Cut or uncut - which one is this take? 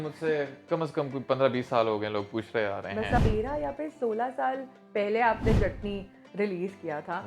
cut